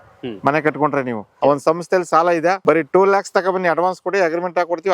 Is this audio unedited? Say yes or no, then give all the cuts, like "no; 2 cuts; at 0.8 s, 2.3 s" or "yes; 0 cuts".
no; 2 cuts; at 1.3 s, 2.6 s